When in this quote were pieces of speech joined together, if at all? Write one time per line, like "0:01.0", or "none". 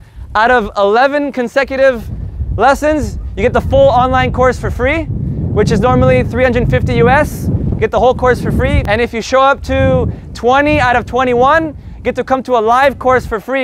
none